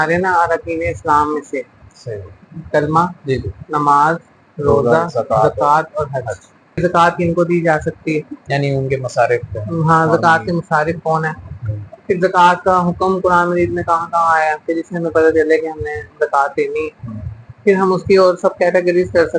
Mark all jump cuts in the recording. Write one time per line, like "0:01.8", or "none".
0:06.8